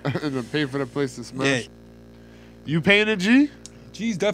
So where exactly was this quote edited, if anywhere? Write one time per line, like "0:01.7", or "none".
0:01.7